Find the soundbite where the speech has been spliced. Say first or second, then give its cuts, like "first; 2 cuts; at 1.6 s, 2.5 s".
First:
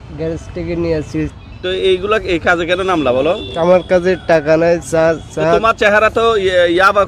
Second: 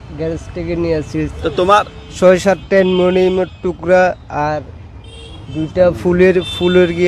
first; 1 cut; at 1.3 s